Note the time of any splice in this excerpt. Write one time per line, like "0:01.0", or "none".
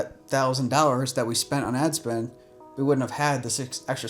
none

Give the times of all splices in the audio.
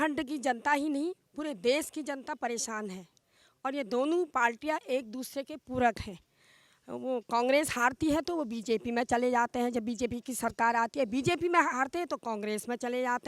none

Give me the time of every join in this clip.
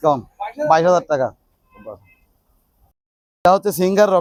none

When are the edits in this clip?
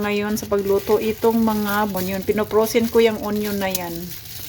0:01.9

